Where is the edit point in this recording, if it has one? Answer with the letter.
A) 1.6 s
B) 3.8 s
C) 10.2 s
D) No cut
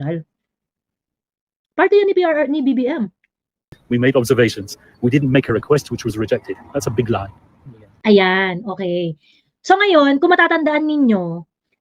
B